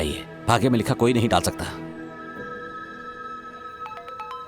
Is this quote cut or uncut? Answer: cut